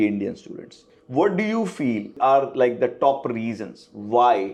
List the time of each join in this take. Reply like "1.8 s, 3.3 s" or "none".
none